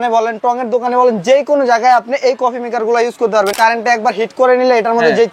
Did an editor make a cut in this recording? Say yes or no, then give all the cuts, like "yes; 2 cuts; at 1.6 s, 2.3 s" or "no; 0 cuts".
yes; 1 cut; at 3.5 s